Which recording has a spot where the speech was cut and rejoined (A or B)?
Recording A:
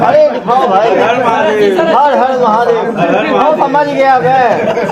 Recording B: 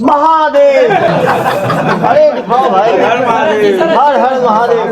B